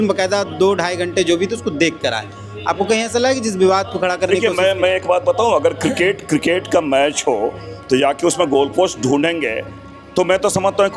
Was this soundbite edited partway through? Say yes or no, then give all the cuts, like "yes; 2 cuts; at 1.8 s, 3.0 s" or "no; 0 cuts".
no; 0 cuts